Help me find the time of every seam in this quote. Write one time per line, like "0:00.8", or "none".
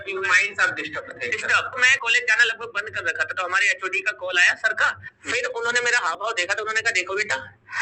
0:01.9
0:05.1